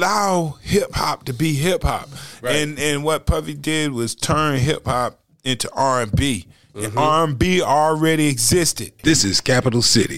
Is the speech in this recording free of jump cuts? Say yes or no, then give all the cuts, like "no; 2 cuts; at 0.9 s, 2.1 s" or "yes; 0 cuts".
no; 1 cut; at 9.0 s